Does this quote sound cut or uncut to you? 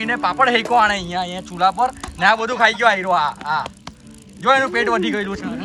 uncut